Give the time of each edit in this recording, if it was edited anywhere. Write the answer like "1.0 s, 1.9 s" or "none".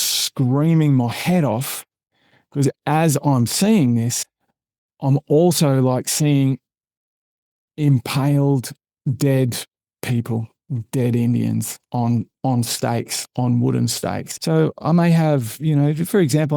14.3 s